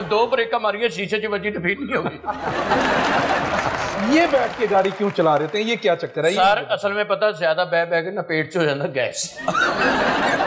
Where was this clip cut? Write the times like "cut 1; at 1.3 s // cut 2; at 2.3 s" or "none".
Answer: cut 1; at 3.9 s